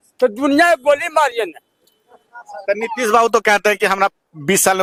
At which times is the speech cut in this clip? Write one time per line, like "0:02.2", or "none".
none